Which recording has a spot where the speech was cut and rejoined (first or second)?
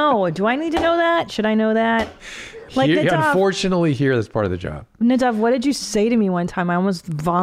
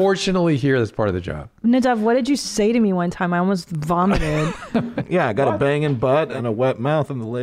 second